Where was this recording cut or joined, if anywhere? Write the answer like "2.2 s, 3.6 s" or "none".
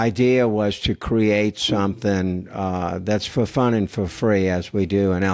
none